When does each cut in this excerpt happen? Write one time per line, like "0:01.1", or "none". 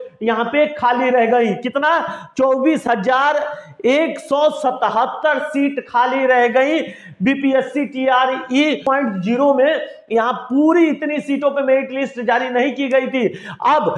0:08.8